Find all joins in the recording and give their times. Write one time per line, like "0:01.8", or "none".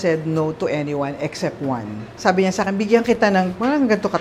0:02.2